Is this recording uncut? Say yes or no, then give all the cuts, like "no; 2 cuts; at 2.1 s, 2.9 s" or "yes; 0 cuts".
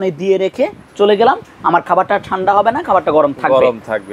yes; 0 cuts